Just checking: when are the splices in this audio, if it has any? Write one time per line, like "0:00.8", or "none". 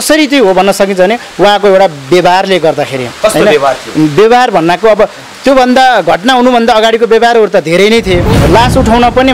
0:08.3